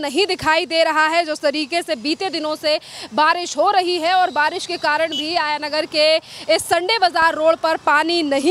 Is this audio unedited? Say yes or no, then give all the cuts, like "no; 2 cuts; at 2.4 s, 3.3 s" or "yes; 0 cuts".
yes; 0 cuts